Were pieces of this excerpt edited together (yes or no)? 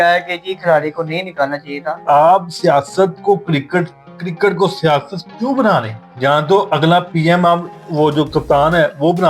yes